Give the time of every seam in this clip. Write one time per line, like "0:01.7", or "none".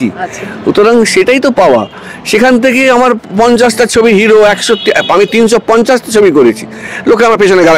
none

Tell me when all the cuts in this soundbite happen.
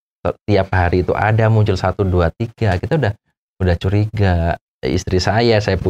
0:04.7

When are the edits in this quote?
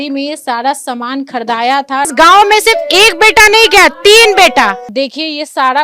0:02.1
0:04.8

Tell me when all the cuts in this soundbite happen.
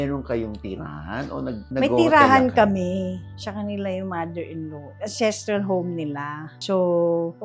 none

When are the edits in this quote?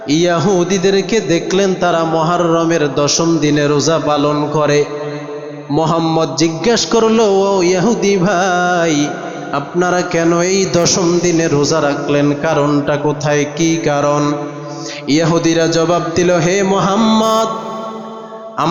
none

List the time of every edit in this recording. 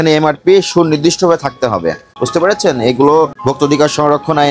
0:02.1
0:03.4

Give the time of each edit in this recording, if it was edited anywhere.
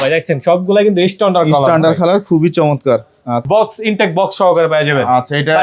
0:03.4

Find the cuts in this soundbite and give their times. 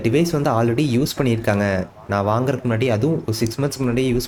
none

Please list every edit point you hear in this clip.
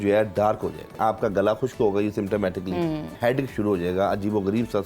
0:01.0
0:03.1

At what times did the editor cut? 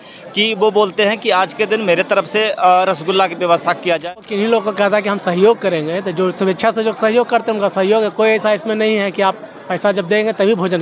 0:04.2

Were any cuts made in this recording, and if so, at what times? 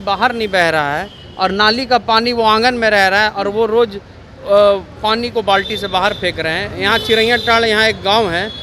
none

